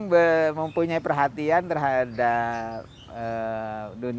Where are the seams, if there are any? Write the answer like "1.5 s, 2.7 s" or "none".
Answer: none